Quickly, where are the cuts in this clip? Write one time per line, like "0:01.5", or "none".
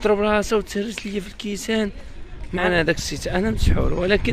0:02.6